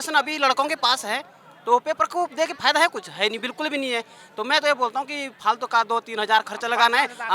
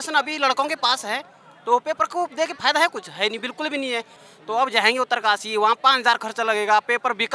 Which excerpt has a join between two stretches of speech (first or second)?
second